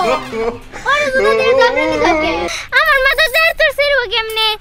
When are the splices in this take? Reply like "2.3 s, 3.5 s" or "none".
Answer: 2.5 s